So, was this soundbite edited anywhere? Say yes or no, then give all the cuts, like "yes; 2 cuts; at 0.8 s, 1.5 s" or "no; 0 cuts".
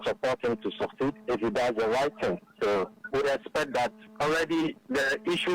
yes; 1 cut; at 3.0 s